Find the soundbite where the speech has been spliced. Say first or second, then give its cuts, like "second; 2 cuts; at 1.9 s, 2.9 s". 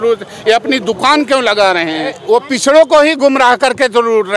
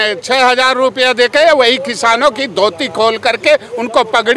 first; 1 cut; at 2.2 s